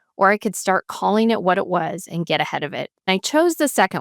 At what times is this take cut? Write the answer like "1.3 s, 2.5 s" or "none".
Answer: 3.1 s